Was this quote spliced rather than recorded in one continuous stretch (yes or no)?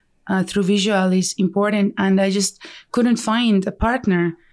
no